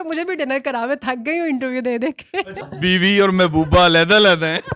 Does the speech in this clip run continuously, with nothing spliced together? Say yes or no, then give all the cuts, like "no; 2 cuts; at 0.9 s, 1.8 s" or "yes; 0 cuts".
no; 1 cut; at 2.6 s